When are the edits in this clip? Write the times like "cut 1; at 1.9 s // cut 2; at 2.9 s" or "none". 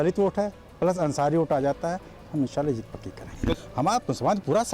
cut 1; at 3.6 s